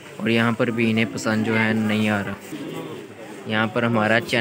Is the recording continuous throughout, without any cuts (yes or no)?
no